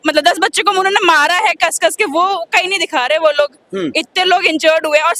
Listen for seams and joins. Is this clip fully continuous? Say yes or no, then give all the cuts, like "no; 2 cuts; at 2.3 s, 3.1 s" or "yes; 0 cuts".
yes; 0 cuts